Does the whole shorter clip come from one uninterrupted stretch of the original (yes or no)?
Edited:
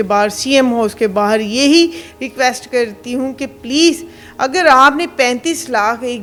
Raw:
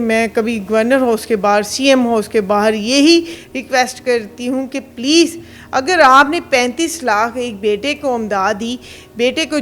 yes